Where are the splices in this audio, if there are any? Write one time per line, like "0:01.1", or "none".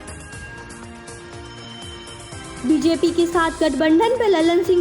0:02.4